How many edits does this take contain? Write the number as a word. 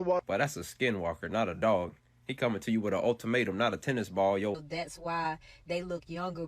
one